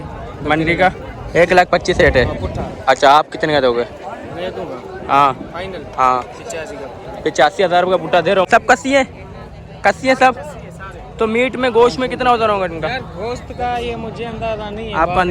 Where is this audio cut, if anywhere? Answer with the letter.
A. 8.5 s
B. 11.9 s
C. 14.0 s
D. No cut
A